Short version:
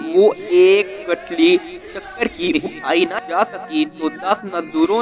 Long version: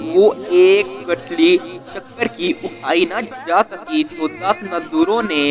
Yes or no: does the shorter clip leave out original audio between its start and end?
yes